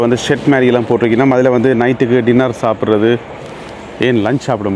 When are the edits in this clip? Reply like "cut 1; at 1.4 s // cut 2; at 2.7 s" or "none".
none